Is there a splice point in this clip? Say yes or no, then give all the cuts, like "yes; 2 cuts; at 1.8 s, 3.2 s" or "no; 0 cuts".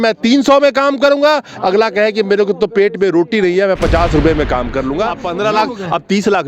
yes; 1 cut; at 5.2 s